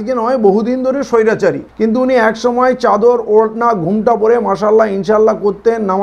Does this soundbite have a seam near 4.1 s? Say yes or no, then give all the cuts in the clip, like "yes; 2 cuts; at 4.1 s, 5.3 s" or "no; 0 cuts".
no; 1 cut; at 1.6 s